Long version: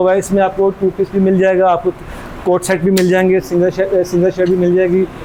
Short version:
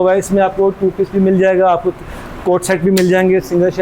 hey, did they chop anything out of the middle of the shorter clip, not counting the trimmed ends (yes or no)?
no